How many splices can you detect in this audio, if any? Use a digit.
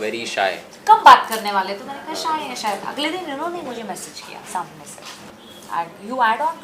1